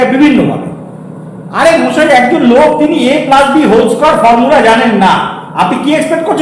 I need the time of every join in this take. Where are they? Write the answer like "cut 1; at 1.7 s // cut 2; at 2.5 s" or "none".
none

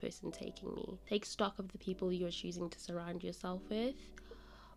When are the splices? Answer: cut 1; at 1.0 s

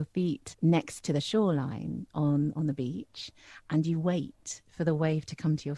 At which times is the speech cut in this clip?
none

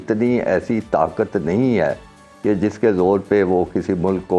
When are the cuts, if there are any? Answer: none

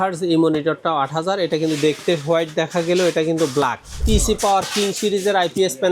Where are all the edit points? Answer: cut 1; at 4.0 s

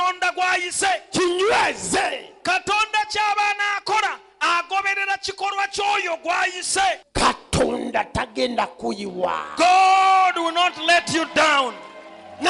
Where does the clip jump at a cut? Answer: cut 1; at 7.0 s

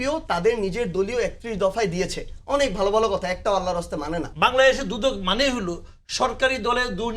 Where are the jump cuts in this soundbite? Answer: cut 1; at 4.3 s

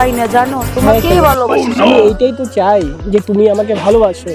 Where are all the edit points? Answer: none

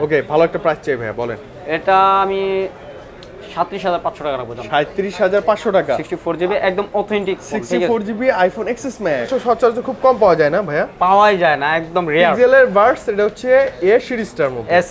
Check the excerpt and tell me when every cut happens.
cut 1; at 9.3 s

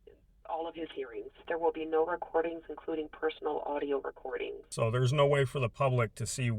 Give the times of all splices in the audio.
cut 1; at 1.4 s // cut 2; at 4.6 s

